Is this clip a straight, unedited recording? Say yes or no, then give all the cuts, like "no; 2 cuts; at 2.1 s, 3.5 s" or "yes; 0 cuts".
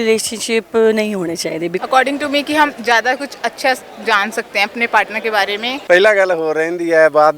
no; 2 cuts; at 1.8 s, 5.7 s